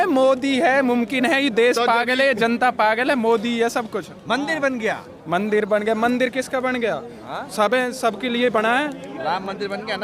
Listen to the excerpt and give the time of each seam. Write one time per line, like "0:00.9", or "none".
none